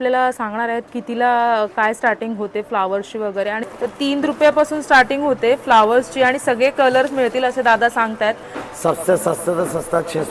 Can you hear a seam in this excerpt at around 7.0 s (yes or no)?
no